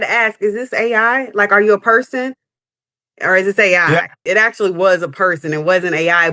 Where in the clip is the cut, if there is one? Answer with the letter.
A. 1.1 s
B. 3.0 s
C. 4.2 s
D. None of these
C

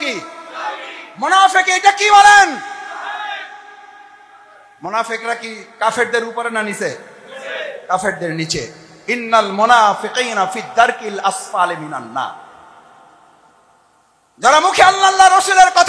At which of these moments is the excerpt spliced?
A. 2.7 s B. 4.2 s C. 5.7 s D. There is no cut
D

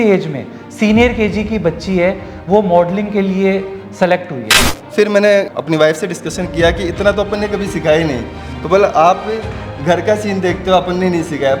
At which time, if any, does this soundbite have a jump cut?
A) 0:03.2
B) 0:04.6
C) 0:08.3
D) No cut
B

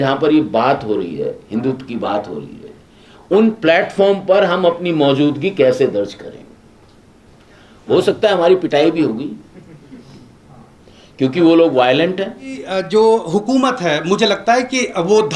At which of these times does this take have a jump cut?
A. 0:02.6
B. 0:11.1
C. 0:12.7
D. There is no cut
C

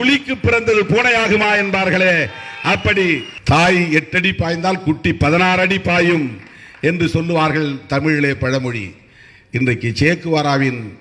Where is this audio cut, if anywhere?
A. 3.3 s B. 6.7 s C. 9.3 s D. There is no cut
A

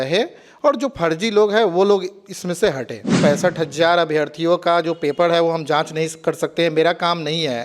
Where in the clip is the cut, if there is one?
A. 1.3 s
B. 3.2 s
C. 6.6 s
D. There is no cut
B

